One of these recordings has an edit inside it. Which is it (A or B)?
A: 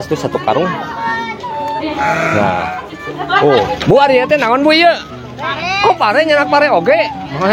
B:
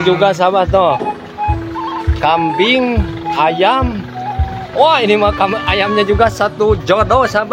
A